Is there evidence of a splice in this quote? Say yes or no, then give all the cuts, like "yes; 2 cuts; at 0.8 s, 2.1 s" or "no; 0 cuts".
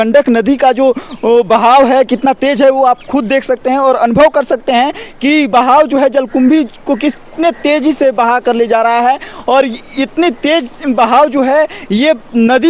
no; 0 cuts